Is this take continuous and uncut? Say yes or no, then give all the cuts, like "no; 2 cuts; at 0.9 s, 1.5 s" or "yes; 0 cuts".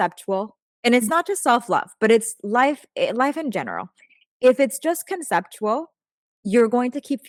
yes; 0 cuts